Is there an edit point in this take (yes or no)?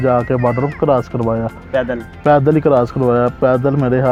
no